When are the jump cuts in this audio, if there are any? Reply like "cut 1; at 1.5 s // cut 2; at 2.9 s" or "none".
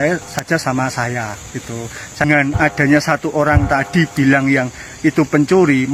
cut 1; at 2.2 s